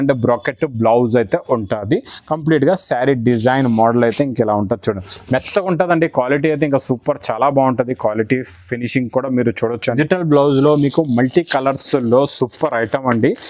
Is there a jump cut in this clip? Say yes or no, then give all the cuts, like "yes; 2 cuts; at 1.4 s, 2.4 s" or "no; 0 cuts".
yes; 1 cut; at 10.0 s